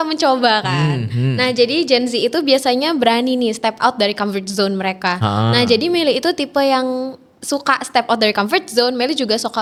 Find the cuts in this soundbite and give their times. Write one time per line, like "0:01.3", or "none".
none